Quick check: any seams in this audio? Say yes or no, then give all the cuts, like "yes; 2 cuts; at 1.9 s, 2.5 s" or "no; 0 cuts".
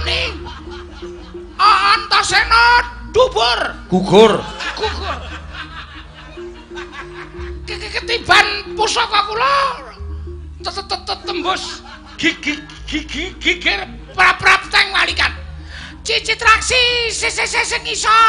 no; 0 cuts